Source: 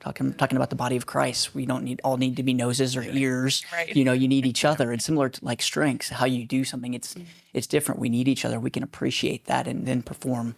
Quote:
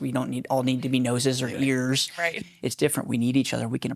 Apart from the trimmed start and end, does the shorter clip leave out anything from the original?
yes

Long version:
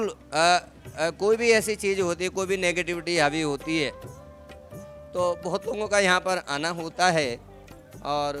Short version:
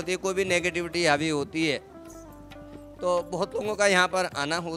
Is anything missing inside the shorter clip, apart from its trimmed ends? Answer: no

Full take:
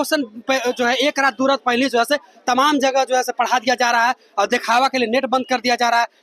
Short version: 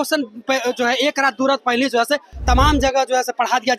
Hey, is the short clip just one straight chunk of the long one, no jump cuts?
yes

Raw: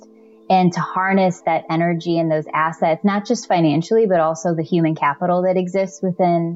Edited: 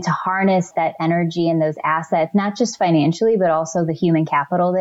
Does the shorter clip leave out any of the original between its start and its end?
no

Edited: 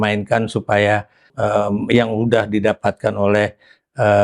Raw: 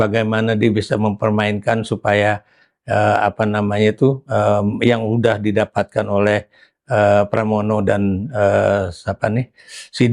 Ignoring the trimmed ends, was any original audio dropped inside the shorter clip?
yes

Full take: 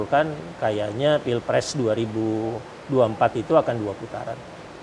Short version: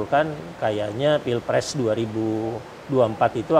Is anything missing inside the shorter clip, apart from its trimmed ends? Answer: no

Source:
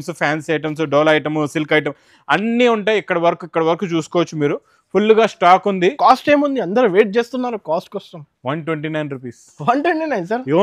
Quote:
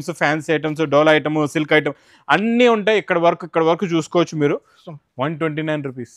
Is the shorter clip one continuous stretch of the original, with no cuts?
no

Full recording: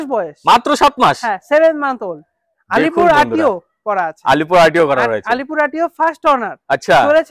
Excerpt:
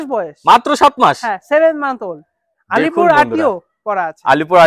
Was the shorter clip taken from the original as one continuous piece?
yes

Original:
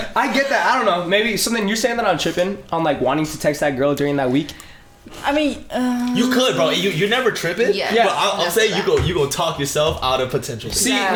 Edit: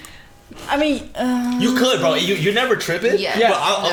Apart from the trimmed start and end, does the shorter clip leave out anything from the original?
no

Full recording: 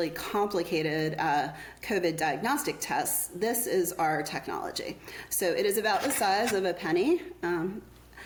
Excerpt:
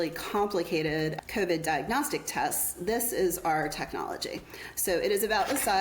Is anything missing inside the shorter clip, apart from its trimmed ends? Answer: yes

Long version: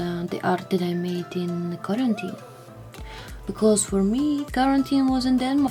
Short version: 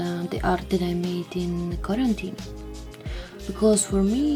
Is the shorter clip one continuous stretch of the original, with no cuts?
yes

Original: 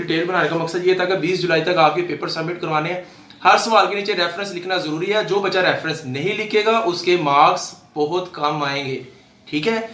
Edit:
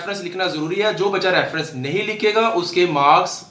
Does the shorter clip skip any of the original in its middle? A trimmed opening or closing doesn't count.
no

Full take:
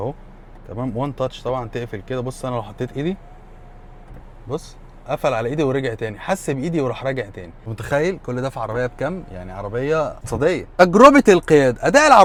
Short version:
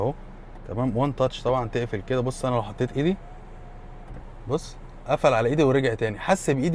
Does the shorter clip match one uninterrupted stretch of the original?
yes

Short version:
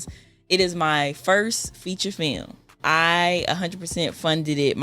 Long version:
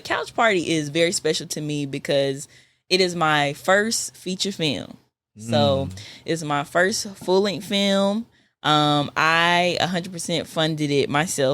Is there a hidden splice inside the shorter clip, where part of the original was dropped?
yes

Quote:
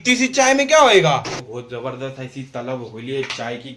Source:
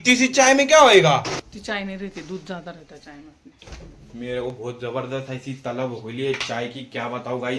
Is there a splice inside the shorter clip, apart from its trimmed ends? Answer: yes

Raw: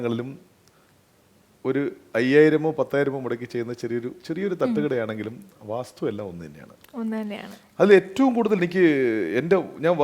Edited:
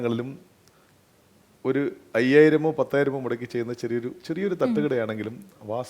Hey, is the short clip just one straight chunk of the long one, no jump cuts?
yes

